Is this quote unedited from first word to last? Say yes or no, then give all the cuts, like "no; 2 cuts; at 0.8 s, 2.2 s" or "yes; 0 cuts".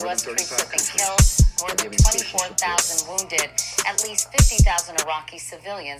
yes; 0 cuts